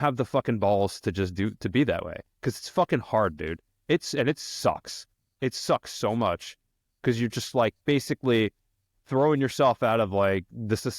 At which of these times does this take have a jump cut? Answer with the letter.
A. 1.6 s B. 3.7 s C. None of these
C